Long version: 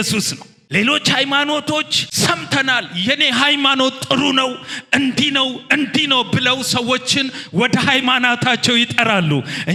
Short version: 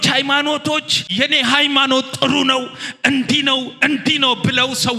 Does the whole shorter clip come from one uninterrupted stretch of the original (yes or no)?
no